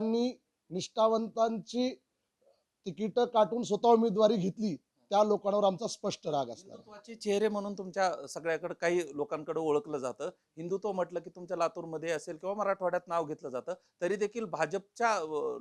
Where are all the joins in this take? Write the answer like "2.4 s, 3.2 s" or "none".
none